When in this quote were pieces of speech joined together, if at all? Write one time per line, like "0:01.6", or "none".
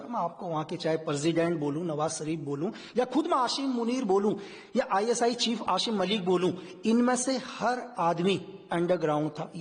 none